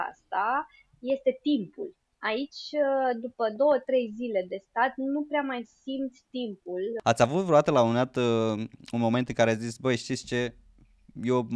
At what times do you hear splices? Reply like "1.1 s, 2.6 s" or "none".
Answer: 7.0 s